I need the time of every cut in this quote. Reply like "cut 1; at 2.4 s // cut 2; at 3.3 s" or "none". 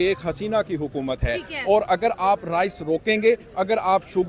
none